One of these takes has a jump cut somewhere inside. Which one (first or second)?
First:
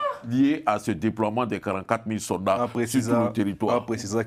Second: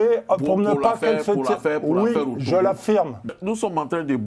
second